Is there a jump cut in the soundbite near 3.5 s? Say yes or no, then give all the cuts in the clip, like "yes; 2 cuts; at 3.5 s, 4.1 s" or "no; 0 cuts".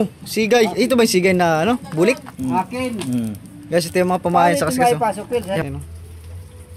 no; 1 cut; at 5.6 s